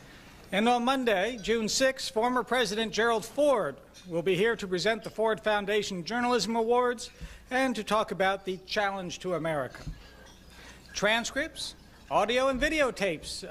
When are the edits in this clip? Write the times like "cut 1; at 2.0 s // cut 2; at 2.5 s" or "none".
cut 1; at 2.0 s